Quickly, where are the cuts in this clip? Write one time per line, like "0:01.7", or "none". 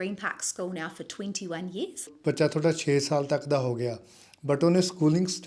0:02.1